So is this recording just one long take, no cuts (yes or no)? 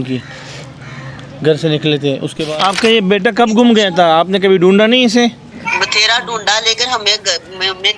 no